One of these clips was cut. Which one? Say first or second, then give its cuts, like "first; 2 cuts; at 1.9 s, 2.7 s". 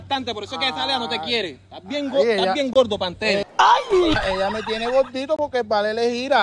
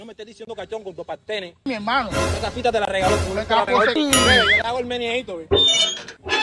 second; 2 cuts; at 1.7 s, 4.0 s